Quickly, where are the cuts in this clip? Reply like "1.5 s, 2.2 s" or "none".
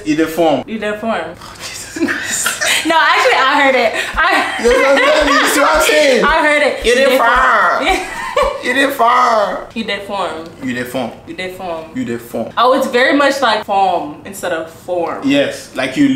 none